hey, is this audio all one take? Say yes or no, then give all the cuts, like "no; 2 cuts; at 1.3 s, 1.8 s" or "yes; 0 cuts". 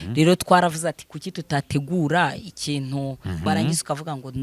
no; 1 cut; at 3.5 s